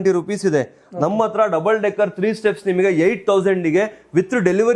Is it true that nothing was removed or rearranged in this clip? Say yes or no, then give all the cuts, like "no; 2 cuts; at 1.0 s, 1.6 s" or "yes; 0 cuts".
yes; 0 cuts